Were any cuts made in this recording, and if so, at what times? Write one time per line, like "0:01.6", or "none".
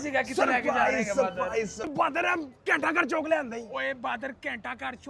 0:01.8